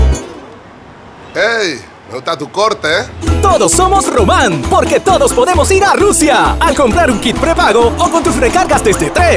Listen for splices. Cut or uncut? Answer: uncut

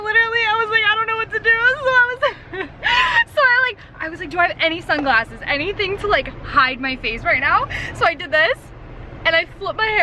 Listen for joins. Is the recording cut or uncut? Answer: uncut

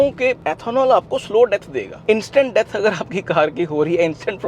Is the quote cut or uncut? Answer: cut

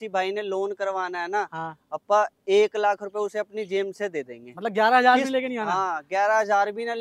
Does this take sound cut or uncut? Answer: uncut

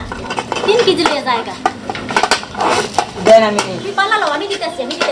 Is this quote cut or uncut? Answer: uncut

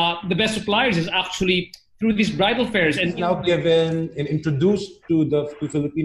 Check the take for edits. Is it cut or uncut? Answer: cut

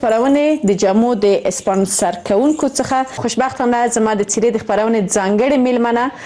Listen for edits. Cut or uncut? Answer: cut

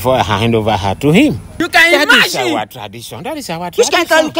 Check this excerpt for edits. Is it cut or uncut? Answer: cut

